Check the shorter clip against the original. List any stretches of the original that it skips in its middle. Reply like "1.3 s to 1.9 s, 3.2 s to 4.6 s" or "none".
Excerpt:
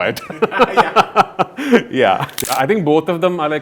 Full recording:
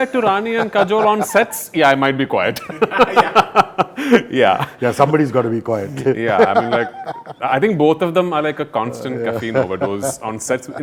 4.7 s to 7.2 s